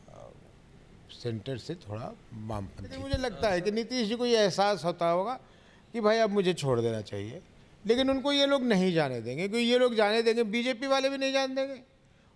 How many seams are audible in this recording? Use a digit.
1